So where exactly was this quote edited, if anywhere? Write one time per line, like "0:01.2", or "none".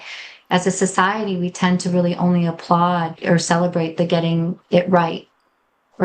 0:03.1